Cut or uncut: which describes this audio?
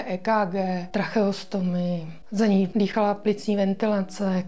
cut